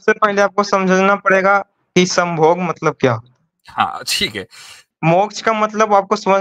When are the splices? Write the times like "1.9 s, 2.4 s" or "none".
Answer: 4.9 s